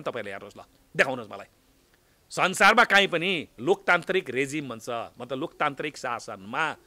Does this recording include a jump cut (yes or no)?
no